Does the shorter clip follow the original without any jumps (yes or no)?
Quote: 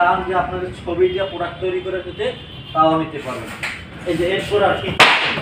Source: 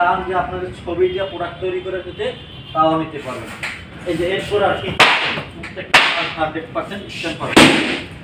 yes